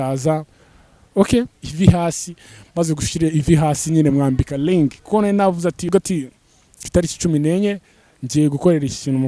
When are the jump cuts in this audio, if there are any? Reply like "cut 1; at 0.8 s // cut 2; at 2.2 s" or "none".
cut 1; at 1.6 s // cut 2; at 5.9 s